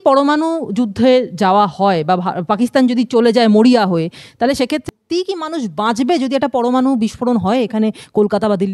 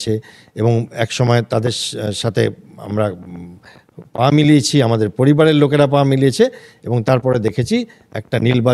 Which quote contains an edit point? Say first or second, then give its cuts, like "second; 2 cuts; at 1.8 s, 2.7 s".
first; 1 cut; at 4.8 s